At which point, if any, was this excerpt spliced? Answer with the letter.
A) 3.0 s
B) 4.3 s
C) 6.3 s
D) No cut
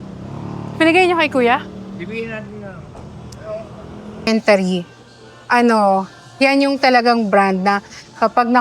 B